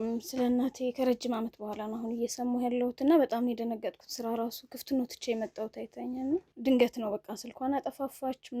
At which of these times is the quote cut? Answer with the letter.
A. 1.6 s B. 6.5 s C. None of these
B